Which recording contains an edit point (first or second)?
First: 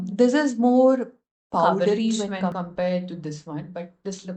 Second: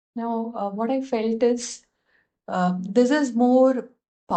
first